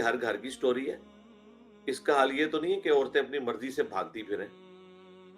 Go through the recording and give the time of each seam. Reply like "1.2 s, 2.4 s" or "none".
none